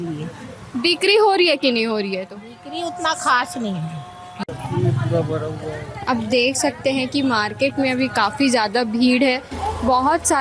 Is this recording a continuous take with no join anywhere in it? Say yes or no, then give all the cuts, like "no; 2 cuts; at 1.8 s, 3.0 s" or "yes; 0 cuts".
no; 1 cut; at 4.4 s